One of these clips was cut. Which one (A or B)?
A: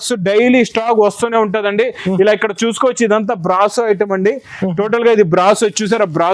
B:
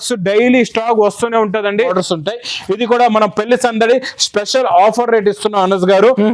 B